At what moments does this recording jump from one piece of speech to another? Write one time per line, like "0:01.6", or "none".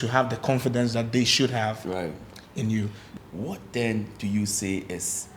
0:03.0